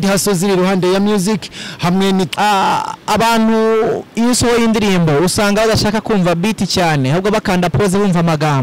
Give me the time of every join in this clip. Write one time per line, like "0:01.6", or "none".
0:02.3